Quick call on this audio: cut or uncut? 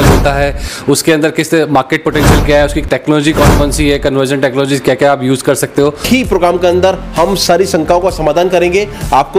cut